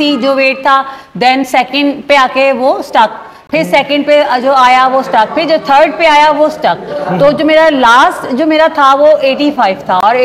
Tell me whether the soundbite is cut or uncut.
uncut